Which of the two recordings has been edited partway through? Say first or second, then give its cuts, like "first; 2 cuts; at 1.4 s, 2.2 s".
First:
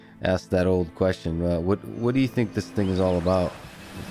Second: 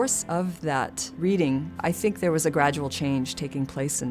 second; 2 cuts; at 1.0 s, 1.7 s